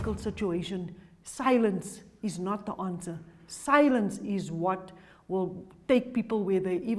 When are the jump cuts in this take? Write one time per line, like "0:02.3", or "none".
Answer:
none